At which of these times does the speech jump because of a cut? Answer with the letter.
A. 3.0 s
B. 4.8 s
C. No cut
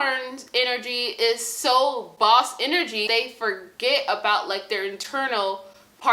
A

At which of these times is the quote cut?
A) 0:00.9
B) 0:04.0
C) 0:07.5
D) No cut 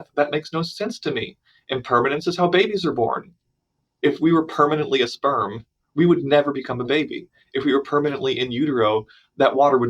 B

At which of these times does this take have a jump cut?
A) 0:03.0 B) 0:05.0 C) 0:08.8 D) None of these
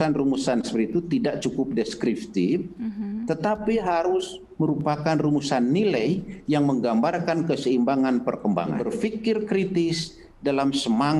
C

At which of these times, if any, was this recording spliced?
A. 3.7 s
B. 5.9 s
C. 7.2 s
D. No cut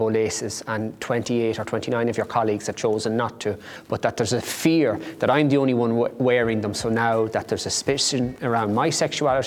D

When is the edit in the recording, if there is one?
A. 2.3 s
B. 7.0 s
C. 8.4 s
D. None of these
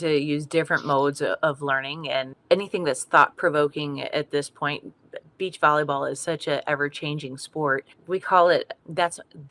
A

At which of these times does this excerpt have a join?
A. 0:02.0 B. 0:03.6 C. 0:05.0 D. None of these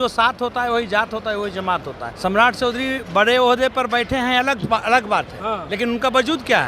A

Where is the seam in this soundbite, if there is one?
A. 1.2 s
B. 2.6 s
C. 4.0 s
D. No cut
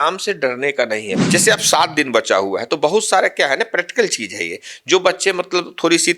A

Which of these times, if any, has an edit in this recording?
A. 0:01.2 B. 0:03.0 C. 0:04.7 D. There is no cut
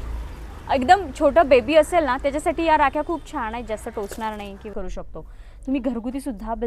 C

